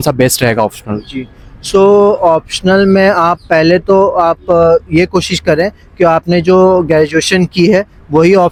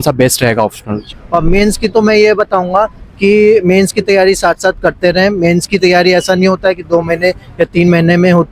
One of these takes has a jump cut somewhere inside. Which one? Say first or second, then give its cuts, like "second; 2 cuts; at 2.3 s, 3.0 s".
second; 1 cut; at 1.1 s